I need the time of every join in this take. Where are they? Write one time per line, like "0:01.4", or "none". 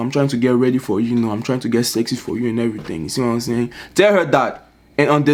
none